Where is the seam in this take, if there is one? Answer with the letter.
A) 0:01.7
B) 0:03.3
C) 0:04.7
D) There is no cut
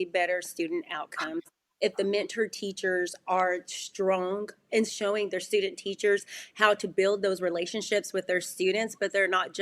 C